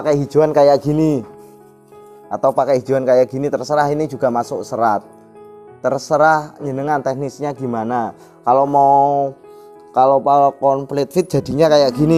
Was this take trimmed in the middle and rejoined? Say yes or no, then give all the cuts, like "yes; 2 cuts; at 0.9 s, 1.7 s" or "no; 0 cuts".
no; 0 cuts